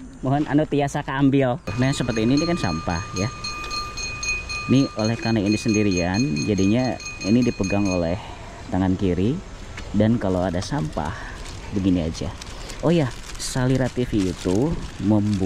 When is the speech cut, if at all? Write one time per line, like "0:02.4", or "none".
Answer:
0:01.7